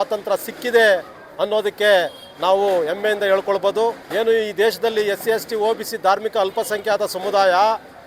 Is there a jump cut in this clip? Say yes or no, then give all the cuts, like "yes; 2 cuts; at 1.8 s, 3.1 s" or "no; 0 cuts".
yes; 1 cut; at 4.0 s